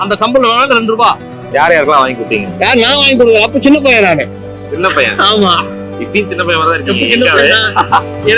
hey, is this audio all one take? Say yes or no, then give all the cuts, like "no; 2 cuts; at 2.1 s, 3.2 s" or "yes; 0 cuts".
yes; 0 cuts